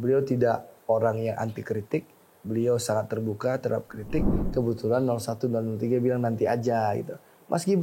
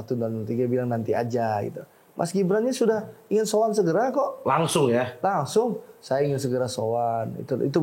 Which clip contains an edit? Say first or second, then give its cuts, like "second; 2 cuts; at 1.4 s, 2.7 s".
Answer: first; 1 cut; at 4.4 s